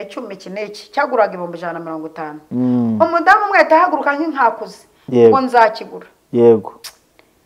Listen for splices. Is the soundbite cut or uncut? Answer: uncut